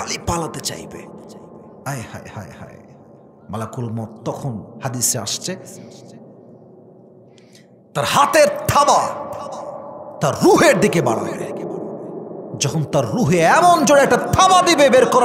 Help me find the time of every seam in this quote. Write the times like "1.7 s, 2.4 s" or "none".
none